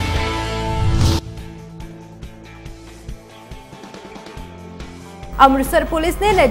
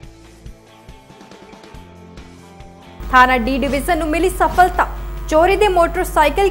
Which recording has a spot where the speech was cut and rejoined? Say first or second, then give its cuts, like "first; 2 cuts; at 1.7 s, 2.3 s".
second; 1 cut; at 2.7 s